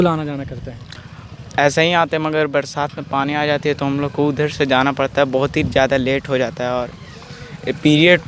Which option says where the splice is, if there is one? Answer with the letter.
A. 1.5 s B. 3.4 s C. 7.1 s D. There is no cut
D